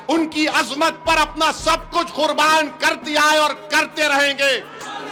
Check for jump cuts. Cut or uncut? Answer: uncut